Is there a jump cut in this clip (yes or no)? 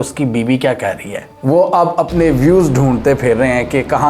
yes